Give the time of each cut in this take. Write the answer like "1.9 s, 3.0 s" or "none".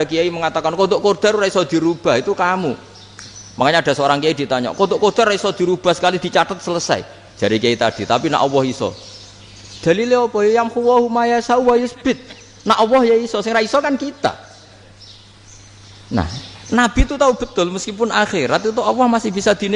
none